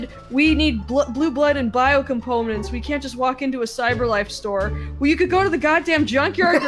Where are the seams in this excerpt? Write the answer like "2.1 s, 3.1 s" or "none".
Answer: none